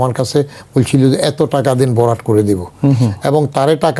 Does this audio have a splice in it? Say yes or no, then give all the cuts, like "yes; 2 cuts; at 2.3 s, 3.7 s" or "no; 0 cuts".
no; 0 cuts